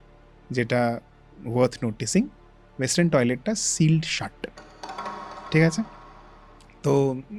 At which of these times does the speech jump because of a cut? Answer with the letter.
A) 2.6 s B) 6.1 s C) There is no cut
C